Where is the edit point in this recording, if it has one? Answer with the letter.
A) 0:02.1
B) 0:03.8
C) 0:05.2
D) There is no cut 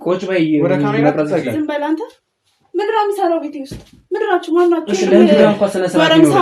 D